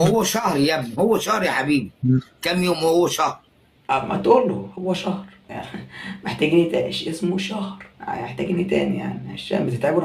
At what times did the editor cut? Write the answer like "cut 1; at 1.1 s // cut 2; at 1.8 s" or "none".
none